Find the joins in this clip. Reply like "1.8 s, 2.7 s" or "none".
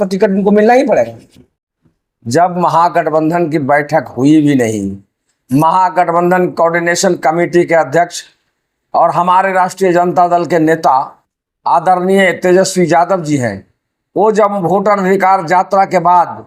1.5 s